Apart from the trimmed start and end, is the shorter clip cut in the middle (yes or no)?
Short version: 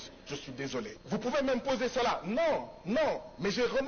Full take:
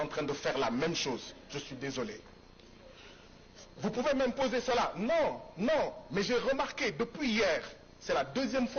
yes